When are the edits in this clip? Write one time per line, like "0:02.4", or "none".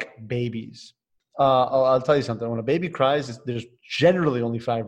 none